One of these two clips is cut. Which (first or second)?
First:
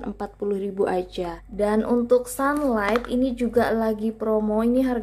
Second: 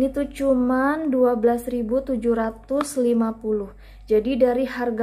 first